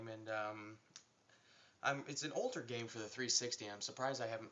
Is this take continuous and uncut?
no; 1 cut; at 3.1 s

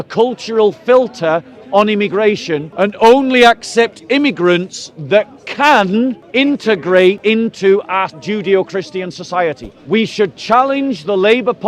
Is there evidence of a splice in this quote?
yes; 5 cuts; at 2.6 s, 6.2 s, 7.2 s, 8.2 s, 9.7 s

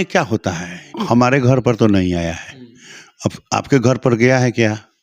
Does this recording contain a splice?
yes; 1 cut; at 0.9 s

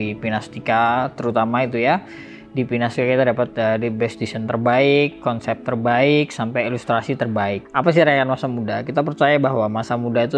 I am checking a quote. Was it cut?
yes; 1 cut; at 7.6 s

